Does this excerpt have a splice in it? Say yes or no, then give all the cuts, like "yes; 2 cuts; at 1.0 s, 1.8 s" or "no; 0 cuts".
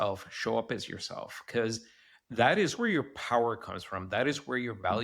yes; 1 cut; at 2.7 s